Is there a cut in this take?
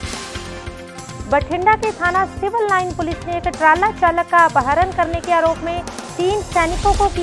no; 0 cuts

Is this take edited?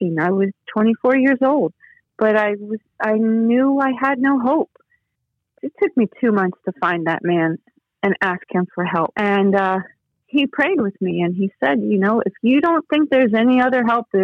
yes; 1 cut; at 5.2 s

